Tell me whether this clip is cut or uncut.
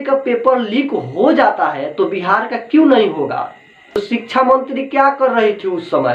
cut